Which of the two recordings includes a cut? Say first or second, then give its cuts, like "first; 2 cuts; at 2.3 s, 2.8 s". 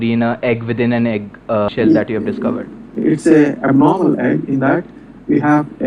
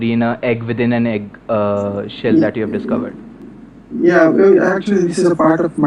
first; 2 cuts; at 1.7 s, 2.9 s